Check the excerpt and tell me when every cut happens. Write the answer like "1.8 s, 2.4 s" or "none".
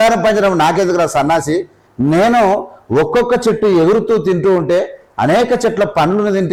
none